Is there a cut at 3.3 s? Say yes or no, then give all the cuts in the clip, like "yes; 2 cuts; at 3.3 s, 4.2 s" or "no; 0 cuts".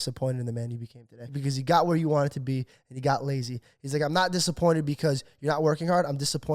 no; 1 cut; at 1.3 s